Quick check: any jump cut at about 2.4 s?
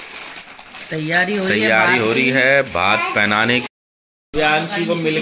no; 1 cut; at 3.6 s

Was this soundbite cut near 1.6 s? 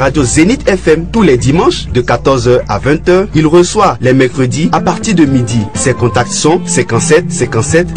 yes; 1 cut; at 1.6 s

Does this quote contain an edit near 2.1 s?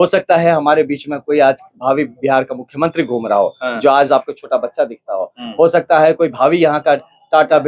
no; 0 cuts

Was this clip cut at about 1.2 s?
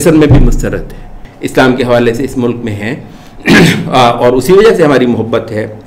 yes; 1 cut; at 1.2 s

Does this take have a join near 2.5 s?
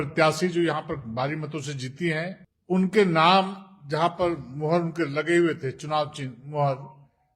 yes; 1 cut; at 2.5 s

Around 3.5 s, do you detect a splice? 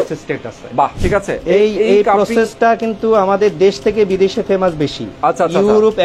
no; 2 cuts; at 1.0 s, 5.1 s

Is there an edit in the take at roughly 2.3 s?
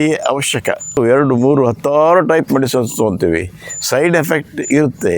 no; 1 cut; at 1.0 s

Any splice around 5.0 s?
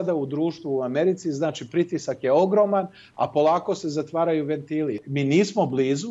yes; 1 cut; at 5.0 s

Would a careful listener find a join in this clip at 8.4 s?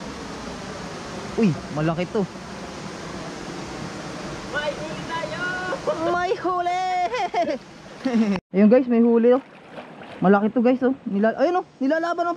yes; 1 cut; at 8.4 s

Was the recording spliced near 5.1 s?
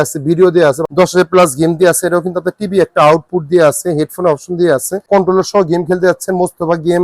yes; 2 cuts; at 0.8 s, 5.1 s

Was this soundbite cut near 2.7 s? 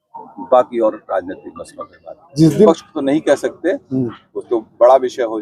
yes; 1 cut; at 2.7 s

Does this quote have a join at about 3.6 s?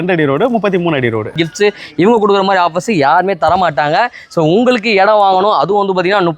no; 1 cut; at 1.3 s

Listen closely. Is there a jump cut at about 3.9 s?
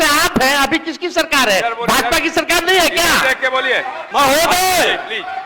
yes; 1 cut; at 3.9 s

